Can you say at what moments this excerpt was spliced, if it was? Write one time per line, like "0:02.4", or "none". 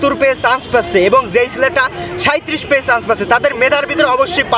none